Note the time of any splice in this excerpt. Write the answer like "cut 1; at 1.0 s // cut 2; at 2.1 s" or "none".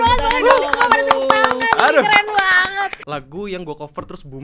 cut 1; at 3.0 s